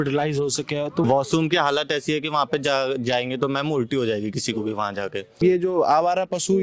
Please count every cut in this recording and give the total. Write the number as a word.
two